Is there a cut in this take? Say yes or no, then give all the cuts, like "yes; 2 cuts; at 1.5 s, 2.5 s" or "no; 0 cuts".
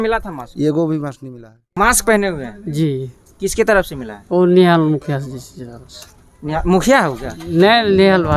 yes; 1 cut; at 1.6 s